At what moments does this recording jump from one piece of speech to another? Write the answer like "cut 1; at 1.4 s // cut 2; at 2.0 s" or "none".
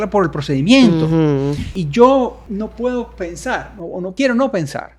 cut 1; at 1.8 s // cut 2; at 2.4 s // cut 3; at 4.1 s

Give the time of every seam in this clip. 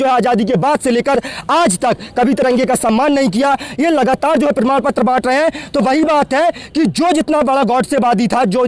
none

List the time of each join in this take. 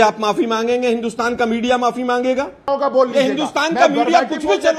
cut 1; at 2.5 s

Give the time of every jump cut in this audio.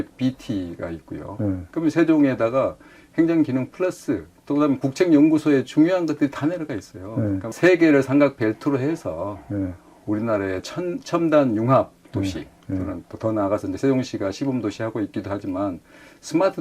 cut 1; at 7.5 s

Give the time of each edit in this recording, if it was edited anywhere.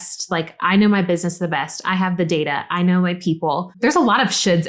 cut 1; at 3.7 s

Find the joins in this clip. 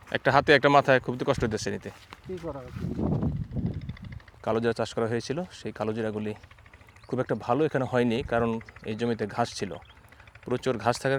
none

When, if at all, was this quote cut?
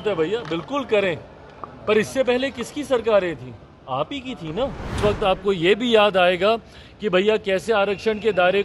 cut 1; at 4.9 s

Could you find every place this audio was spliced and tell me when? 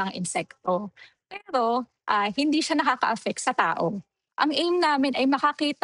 cut 1; at 4.3 s

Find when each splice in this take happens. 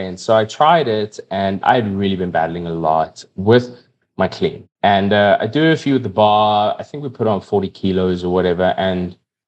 cut 1; at 1.6 s // cut 2; at 3.3 s // cut 3; at 4.6 s

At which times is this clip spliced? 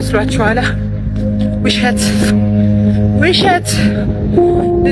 none

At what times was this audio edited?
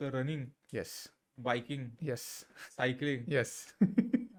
none

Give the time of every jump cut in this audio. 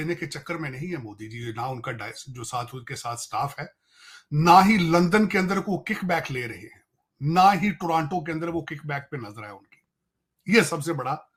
none

